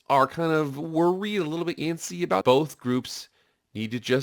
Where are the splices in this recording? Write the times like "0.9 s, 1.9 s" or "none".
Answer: 2.4 s